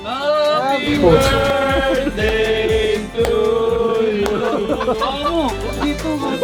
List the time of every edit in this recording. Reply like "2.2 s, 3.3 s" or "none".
none